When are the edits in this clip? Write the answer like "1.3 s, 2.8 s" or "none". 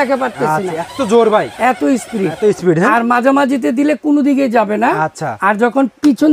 none